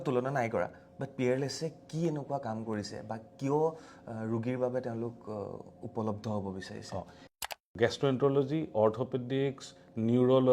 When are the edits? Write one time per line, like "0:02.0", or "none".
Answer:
0:07.2